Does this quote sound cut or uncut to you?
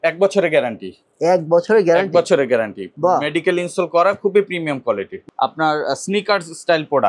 cut